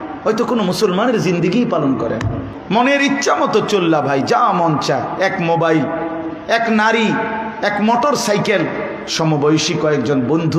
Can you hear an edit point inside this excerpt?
yes; 1 cut; at 2.5 s

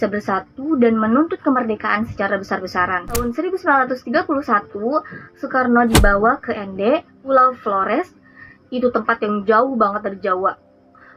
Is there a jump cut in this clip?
yes; 1 cut; at 3.2 s

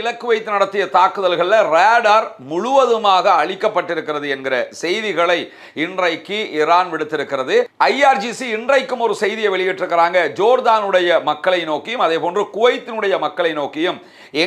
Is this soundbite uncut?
no; 1 cut; at 7.7 s

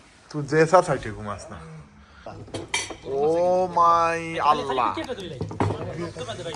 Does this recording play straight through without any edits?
no; 1 cut; at 2.4 s

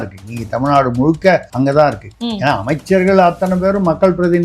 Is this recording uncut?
no; 2 cuts; at 1.5 s, 2.1 s

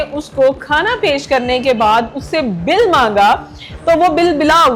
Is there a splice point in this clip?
no; 0 cuts

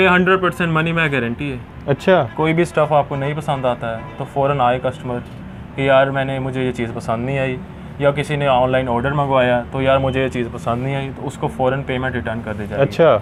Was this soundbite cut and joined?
no; 0 cuts

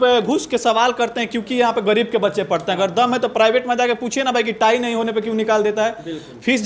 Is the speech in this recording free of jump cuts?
yes; 0 cuts

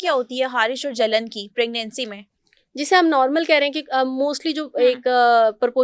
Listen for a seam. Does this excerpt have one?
no; 0 cuts

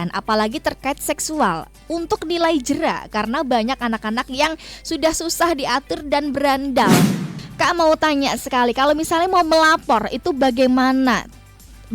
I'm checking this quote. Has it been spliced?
yes; 1 cut; at 7.3 s

